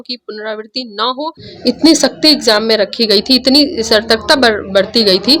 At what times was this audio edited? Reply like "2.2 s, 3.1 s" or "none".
1.5 s